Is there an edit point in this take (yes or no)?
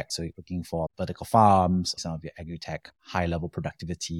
yes